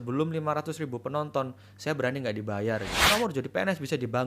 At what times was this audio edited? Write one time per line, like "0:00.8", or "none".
0:03.1